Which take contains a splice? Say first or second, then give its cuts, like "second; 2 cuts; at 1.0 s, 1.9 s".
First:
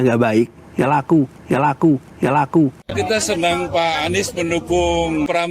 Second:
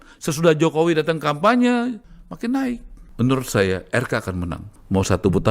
first; 1 cut; at 2.8 s